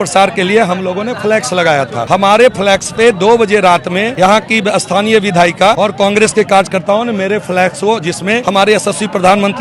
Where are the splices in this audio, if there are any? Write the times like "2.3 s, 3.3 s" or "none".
2.0 s, 4.1 s, 5.8 s, 8.4 s